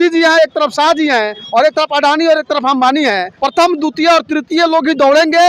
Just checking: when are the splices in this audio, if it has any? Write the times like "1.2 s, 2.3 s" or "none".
3.3 s

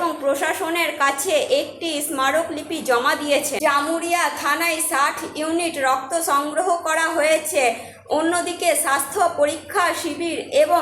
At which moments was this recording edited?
3.6 s

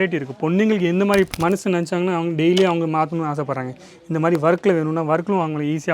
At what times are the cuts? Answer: 1.3 s

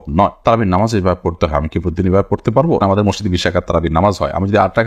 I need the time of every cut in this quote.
2.8 s

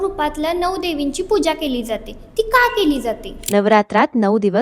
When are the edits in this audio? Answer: 3.3 s

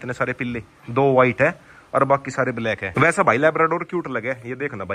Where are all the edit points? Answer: 2.9 s

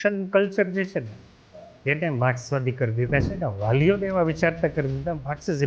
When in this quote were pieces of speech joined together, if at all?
none

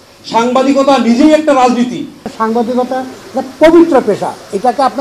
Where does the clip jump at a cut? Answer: 2.3 s

